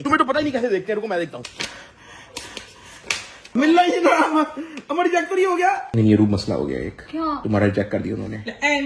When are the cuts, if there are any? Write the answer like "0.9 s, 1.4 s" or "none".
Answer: 1.4 s, 3.5 s, 5.8 s